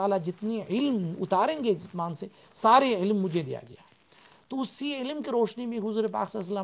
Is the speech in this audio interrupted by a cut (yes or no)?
no